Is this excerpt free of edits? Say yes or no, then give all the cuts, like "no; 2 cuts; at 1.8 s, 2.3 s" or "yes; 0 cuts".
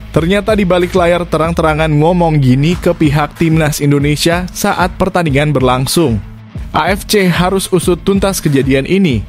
yes; 0 cuts